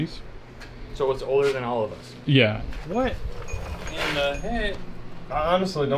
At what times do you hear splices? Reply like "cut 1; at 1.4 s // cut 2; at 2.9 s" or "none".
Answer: cut 1; at 2.6 s